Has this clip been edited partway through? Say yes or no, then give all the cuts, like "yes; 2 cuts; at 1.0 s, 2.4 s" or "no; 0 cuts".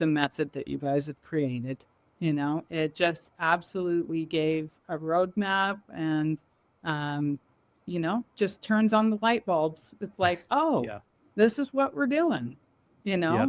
no; 0 cuts